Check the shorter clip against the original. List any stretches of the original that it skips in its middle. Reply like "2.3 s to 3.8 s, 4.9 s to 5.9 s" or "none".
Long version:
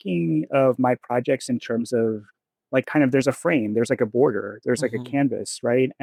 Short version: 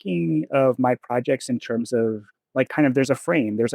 2.3 s to 2.5 s